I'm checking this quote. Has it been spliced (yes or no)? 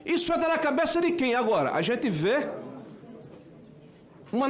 no